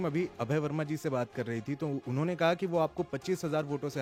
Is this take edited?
no; 0 cuts

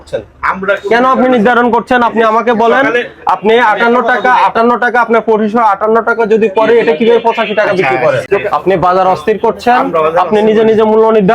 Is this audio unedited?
no; 1 cut; at 8.3 s

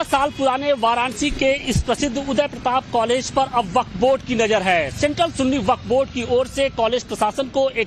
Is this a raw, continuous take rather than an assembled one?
yes; 0 cuts

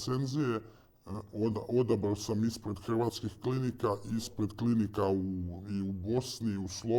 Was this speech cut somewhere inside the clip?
no; 0 cuts

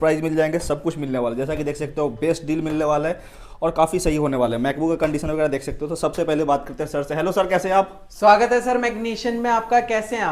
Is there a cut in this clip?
no; 0 cuts

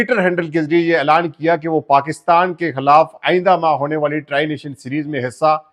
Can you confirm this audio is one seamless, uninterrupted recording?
yes; 0 cuts

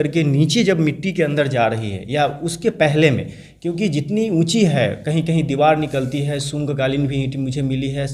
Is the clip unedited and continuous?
yes; 0 cuts

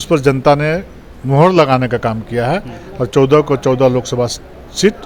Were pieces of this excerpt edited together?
no; 0 cuts

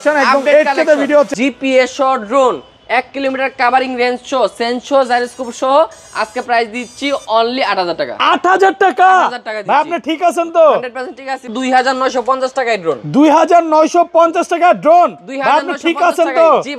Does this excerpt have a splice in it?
yes; 2 cuts; at 1.3 s, 11.5 s

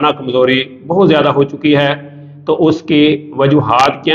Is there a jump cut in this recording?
no; 0 cuts

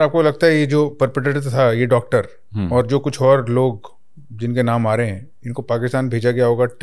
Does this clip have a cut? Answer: no; 0 cuts

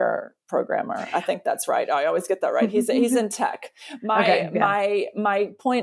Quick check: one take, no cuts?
yes; 0 cuts

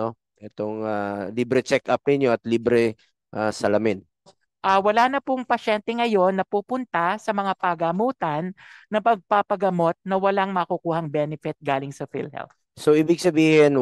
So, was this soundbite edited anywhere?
yes; 1 cut; at 4.4 s

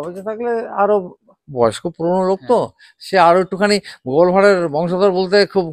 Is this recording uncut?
yes; 0 cuts

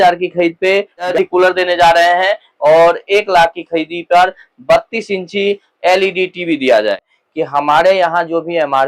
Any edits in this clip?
yes; 2 cuts; at 1.1 s, 7.2 s

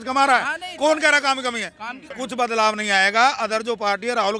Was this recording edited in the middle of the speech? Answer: yes; 1 cut; at 2.1 s

